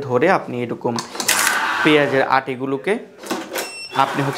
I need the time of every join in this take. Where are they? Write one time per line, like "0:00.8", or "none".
none